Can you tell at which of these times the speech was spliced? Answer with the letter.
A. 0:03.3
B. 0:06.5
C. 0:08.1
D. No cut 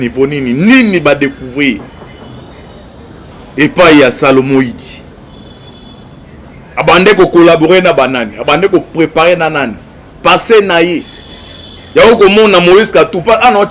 A